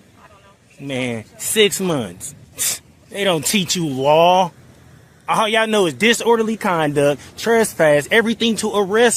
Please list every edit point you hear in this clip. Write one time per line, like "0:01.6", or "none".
none